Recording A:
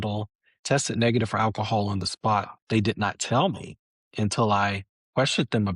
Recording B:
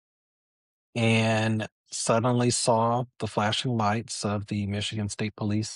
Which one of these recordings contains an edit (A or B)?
A